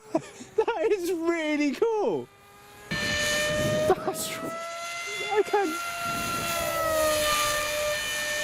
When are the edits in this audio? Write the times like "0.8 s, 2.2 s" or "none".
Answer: 2.9 s